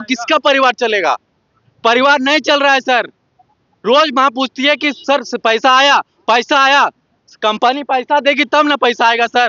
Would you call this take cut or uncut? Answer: uncut